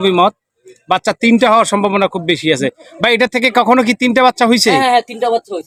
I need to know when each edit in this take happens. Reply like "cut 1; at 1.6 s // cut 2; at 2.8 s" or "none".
none

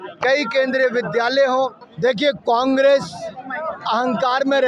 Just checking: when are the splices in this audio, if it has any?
cut 1; at 1.8 s

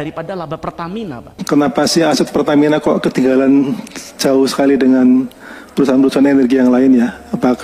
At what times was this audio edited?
cut 1; at 1.4 s

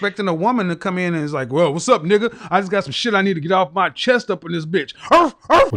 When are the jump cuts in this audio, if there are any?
none

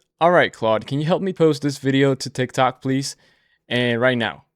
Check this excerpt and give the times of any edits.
cut 1; at 1.3 s

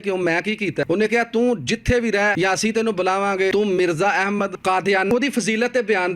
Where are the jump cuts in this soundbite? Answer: cut 1; at 0.8 s // cut 2; at 2.3 s // cut 3; at 3.5 s // cut 4; at 5.1 s

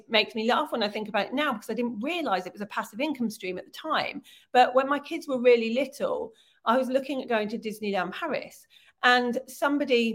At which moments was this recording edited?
none

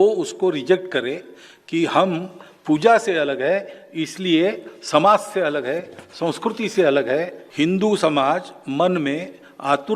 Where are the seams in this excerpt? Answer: cut 1; at 7.4 s

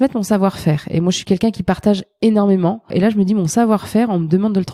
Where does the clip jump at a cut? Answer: cut 1; at 2.9 s

